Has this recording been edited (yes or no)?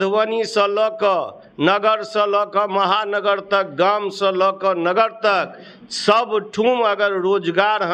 no